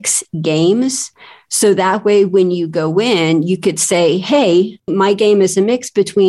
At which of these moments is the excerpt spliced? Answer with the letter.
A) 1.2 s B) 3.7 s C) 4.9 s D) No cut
C